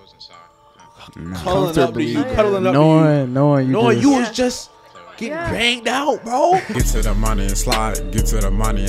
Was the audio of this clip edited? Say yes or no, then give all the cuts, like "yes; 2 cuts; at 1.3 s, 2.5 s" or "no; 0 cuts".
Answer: yes; 1 cut; at 6.7 s